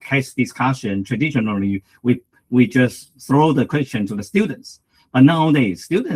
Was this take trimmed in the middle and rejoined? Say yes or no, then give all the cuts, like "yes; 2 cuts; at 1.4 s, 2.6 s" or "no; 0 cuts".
no; 0 cuts